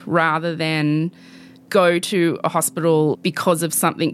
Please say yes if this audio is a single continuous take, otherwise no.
no